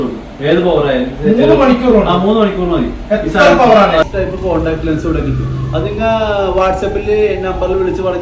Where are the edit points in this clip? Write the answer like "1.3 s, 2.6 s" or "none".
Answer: 4.0 s